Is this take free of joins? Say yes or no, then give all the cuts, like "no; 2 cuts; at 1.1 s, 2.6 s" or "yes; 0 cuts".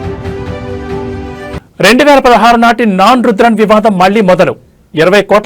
no; 1 cut; at 1.6 s